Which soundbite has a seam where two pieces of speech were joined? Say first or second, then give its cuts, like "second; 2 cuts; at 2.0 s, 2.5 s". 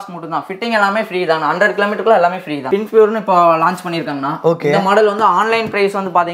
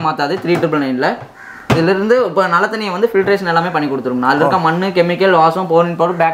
first; 1 cut; at 2.6 s